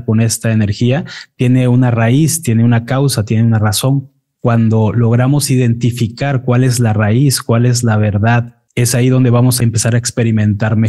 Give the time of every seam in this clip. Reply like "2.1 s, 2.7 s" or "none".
8.6 s, 9.6 s